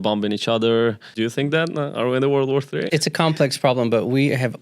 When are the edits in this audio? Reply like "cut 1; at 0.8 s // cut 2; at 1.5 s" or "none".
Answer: cut 1; at 1.1 s // cut 2; at 2.9 s